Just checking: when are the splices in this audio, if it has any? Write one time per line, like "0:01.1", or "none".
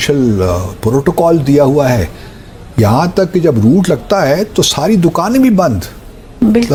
none